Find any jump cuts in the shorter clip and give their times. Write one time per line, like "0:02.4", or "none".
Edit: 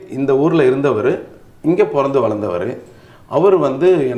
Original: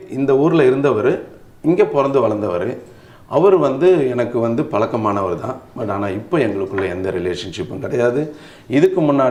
none